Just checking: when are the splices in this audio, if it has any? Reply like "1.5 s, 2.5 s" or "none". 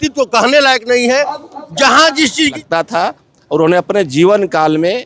2.6 s